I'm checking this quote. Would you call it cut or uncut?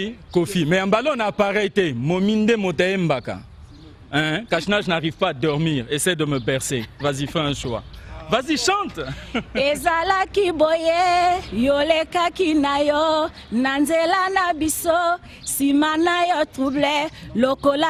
uncut